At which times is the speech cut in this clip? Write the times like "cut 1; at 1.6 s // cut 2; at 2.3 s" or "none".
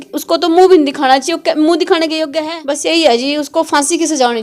cut 1; at 2.3 s